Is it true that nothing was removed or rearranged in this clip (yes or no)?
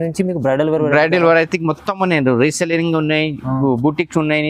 yes